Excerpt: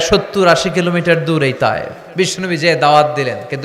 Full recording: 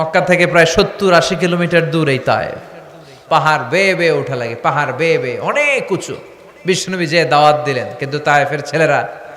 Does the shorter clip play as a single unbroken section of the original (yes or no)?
no